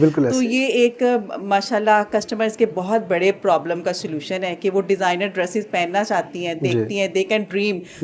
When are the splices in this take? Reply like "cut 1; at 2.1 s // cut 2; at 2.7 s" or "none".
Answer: none